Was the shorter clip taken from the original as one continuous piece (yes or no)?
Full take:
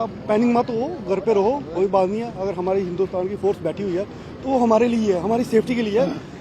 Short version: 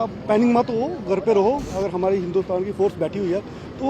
no